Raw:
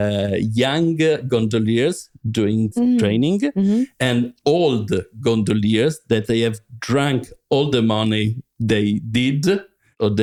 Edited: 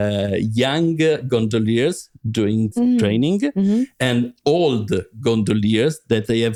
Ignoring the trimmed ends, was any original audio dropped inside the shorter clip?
no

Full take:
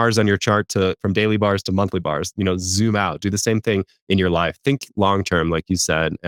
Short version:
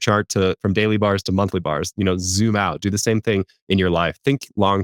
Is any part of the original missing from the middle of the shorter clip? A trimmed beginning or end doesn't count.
no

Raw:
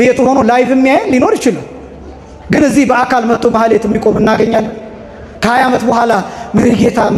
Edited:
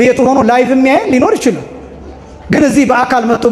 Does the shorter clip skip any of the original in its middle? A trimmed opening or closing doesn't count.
no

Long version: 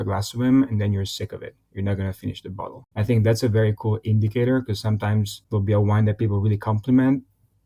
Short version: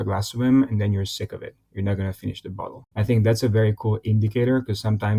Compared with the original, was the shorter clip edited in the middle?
no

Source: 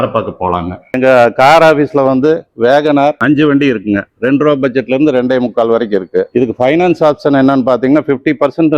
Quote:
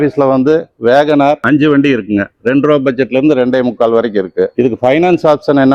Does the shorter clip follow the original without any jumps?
yes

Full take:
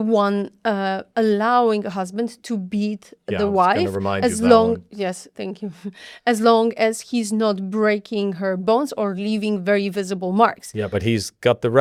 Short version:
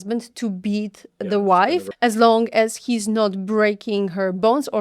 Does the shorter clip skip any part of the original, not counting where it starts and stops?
yes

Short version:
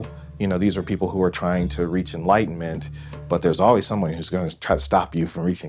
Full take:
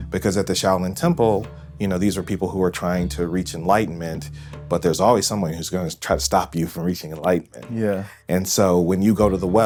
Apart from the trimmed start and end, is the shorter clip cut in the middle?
no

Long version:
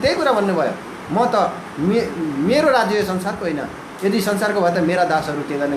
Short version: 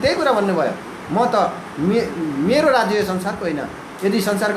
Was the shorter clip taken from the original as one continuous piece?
yes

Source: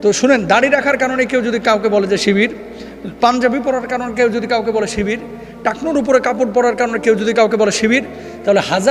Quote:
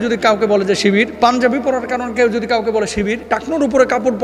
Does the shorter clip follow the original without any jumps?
no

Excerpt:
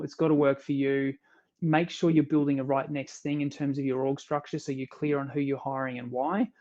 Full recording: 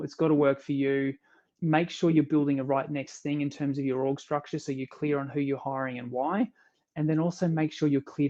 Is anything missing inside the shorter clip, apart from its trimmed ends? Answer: no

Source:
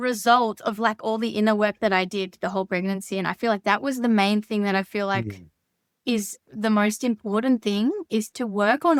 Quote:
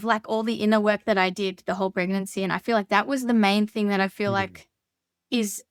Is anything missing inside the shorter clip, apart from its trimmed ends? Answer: no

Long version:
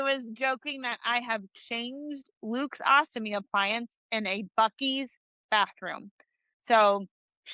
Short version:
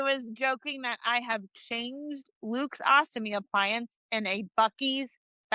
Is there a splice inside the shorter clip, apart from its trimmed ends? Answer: no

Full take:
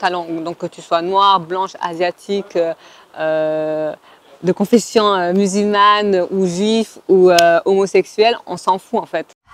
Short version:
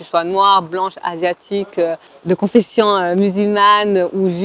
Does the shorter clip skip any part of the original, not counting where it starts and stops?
yes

